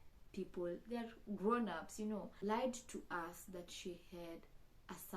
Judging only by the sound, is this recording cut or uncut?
cut